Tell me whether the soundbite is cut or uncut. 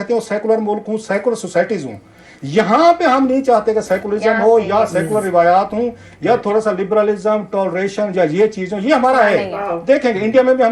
uncut